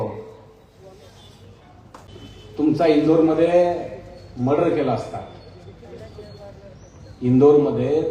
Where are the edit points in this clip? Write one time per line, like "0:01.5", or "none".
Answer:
0:02.0